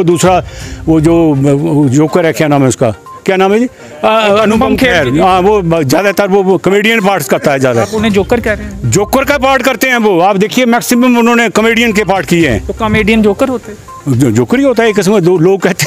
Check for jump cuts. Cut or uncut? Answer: uncut